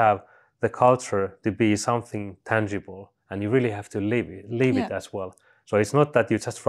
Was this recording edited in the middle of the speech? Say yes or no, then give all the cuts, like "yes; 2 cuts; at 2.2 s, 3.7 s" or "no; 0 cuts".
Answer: no; 0 cuts